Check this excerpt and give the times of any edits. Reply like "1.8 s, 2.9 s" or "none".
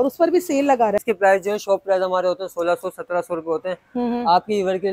1.0 s